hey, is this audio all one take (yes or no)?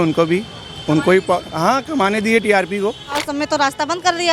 no